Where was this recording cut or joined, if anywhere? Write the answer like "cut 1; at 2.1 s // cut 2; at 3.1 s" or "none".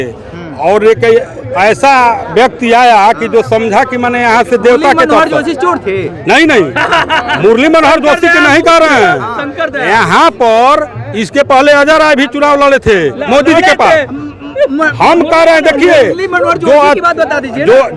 none